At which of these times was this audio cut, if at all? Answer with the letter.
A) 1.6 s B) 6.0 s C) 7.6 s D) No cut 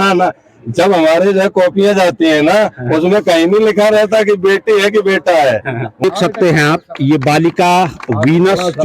B